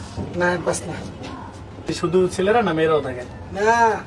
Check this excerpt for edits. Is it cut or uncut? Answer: cut